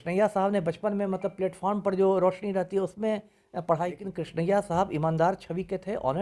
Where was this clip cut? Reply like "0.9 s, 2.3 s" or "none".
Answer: 4.1 s